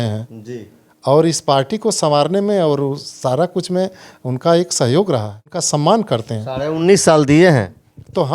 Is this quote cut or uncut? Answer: cut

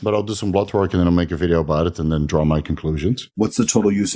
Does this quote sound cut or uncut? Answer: cut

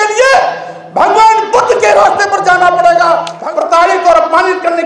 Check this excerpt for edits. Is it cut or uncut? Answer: cut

